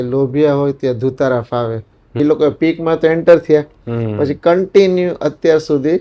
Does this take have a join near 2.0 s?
yes; 1 cut; at 2.0 s

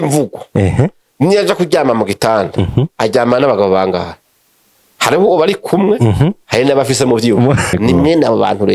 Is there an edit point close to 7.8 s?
yes; 1 cut; at 7.8 s

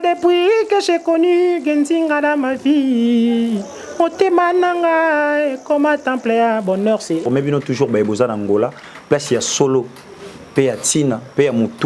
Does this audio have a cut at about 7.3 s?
yes; 1 cut; at 7.3 s

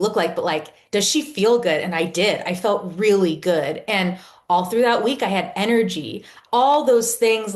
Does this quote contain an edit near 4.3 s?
no; 1 cut; at 6.3 s

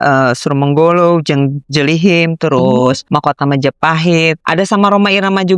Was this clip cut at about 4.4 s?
yes; 2 cuts; at 3.0 s, 4.4 s

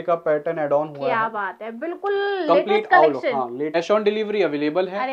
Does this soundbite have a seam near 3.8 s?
yes; 1 cut; at 3.8 s

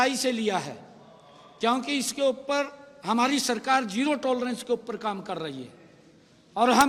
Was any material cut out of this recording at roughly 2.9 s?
no; 0 cuts

